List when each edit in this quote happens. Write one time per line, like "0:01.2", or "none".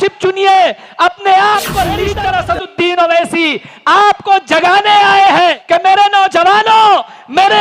0:02.1
0:05.6